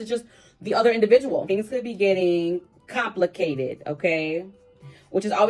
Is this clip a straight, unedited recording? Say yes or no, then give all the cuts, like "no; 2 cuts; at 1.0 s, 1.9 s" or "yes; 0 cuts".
no; 1 cut; at 1.4 s